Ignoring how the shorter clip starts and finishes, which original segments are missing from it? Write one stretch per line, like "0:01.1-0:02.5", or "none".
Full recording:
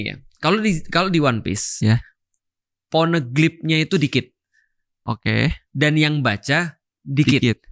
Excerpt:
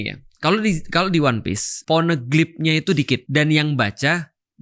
0:01.7-0:02.7
0:04.3-0:05.7